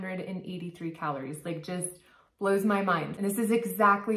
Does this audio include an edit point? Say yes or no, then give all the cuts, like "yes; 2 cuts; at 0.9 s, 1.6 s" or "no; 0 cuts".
yes; 1 cut; at 3.1 s